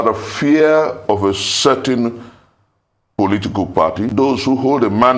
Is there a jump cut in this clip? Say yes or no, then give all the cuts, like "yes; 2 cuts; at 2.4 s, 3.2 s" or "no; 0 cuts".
yes; 1 cut; at 4.1 s